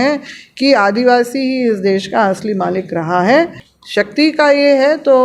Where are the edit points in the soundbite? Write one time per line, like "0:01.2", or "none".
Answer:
0:03.6